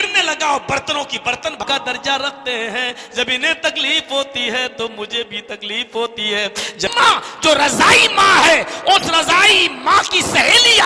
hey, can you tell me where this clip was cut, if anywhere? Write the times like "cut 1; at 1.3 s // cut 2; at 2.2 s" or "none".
cut 1; at 1.6 s // cut 2; at 6.9 s